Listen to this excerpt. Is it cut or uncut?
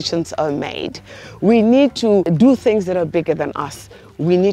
cut